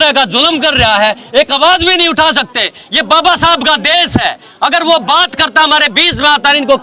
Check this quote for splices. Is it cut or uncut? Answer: uncut